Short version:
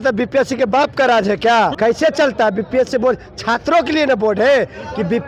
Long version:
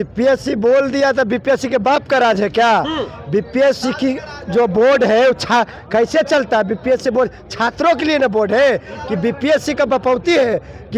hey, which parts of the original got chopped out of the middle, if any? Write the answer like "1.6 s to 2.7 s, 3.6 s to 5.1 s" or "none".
2.9 s to 5.9 s

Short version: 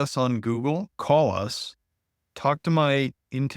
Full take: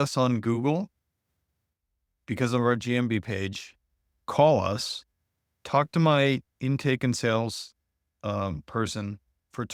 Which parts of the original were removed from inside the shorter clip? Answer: 0.9 s to 4.2 s

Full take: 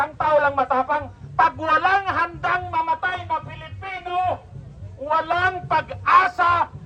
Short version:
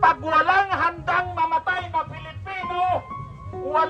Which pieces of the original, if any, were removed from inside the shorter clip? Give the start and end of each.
none

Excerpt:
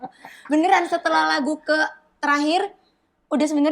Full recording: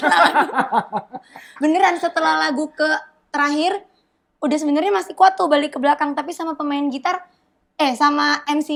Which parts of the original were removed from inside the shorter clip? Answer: none

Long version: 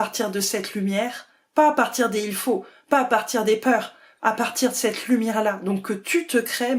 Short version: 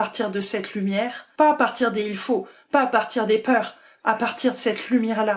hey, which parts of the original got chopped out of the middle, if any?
1.2 s to 1.4 s

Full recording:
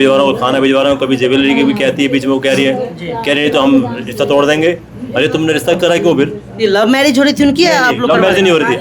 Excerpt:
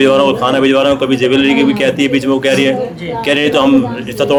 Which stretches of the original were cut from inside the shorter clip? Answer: none

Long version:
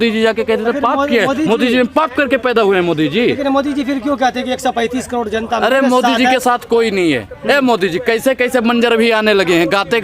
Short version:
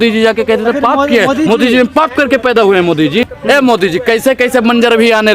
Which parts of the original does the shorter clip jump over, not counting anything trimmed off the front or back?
3.2 s to 7.2 s

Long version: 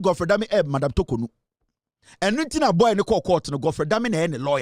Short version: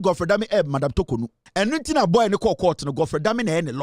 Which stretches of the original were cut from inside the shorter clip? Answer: 1.4 s to 2.0 s

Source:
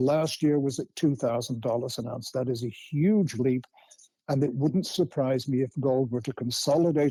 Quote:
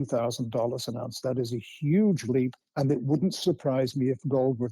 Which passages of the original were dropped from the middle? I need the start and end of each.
3.7 s to 4.1 s

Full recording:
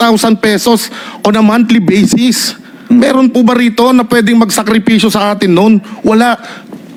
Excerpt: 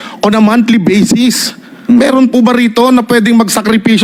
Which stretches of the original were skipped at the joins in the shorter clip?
none

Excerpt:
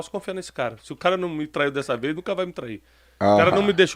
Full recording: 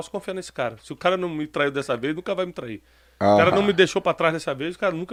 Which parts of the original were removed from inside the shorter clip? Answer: none

